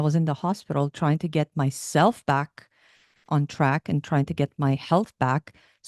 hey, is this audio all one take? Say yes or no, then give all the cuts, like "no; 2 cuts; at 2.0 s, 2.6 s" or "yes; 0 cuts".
yes; 0 cuts